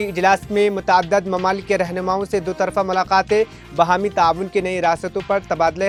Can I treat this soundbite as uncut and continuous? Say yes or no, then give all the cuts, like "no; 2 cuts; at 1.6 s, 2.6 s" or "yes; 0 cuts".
yes; 0 cuts